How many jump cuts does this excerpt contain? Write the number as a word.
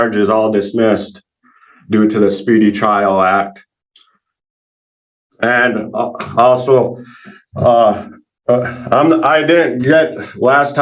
zero